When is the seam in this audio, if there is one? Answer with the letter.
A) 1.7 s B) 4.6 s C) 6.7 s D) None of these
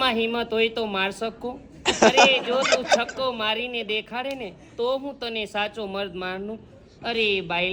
D